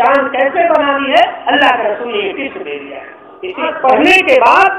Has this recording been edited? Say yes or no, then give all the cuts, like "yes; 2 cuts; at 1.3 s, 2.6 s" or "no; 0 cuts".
yes; 1 cut; at 3.7 s